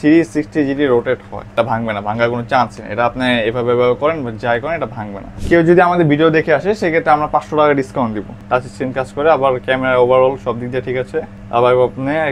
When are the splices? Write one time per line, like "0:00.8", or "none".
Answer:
0:01.5
0:05.3
0:08.3